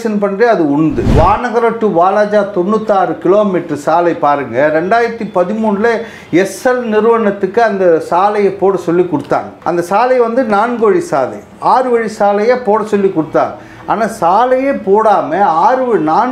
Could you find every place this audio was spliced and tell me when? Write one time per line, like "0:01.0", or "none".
0:01.0
0:09.5

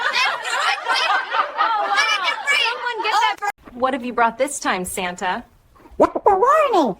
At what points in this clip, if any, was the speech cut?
0:03.6

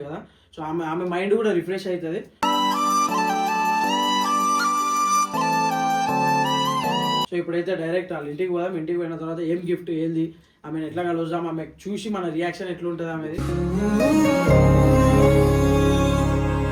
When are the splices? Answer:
none

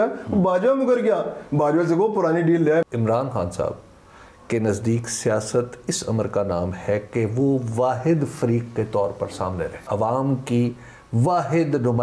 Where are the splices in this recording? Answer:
0:02.8
0:09.8

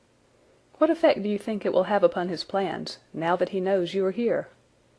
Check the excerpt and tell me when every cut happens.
0:02.3

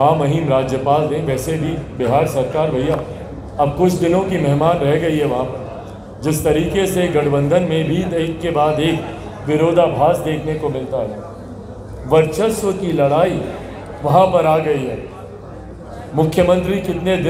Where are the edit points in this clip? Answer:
none

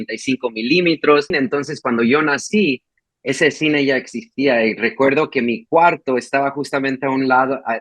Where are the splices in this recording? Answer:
0:01.3

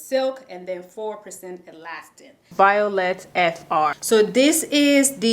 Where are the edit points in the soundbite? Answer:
0:02.5
0:04.0

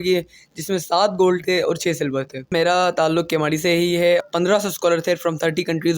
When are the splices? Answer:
0:02.5
0:04.2

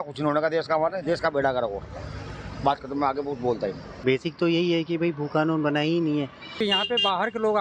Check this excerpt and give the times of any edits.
0:03.9
0:06.6

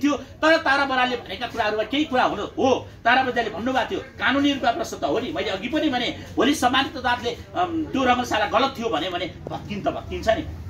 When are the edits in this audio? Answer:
none

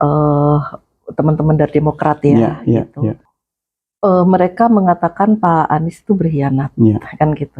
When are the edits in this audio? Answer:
0:03.2

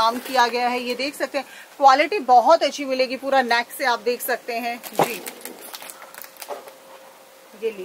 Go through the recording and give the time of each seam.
none

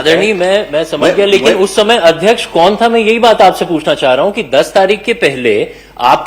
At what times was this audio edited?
none

